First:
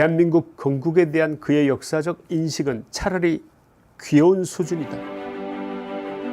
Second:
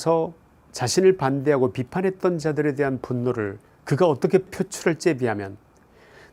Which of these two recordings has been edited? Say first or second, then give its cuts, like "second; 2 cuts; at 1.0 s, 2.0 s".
first; 1 cut; at 4.9 s